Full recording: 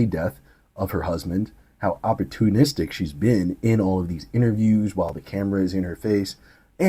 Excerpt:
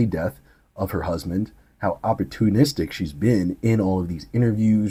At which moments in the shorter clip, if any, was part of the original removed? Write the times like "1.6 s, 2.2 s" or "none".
none